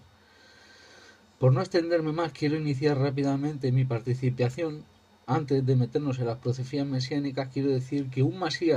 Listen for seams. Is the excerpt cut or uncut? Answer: uncut